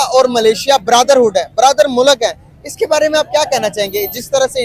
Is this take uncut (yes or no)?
yes